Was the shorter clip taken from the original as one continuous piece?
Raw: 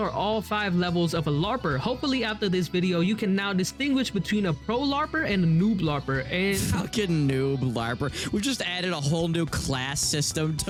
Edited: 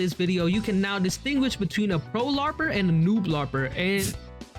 yes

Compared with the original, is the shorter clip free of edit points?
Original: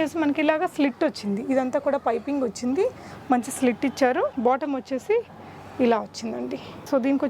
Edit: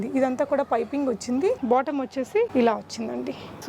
no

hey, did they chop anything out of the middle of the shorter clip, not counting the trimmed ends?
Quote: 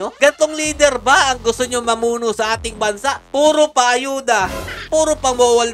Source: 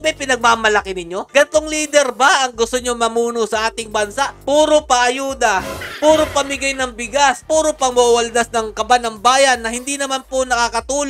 yes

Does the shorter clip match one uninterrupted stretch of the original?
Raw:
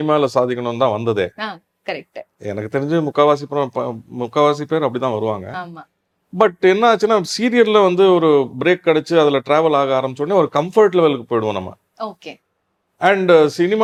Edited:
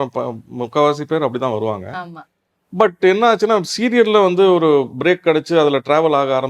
yes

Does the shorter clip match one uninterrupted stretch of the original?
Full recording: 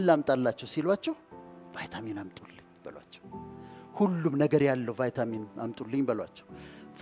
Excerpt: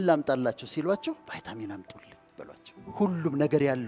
no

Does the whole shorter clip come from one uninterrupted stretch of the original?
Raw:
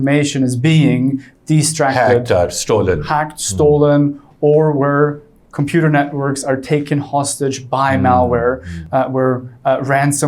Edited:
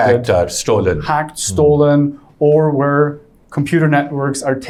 yes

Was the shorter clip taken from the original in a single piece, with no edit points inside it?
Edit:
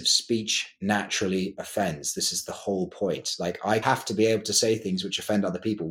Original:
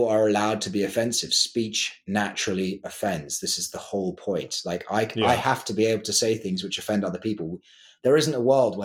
no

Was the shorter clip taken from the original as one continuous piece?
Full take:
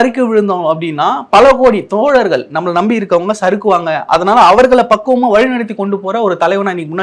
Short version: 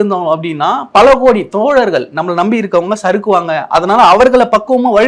yes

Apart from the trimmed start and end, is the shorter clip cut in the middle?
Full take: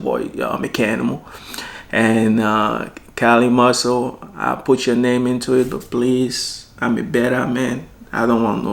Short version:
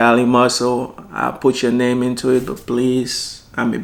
no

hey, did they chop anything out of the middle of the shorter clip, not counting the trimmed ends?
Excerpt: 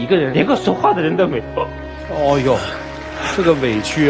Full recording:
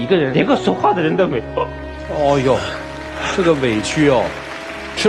no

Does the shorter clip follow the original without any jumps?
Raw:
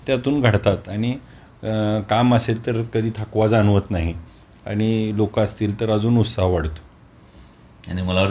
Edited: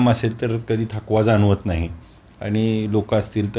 yes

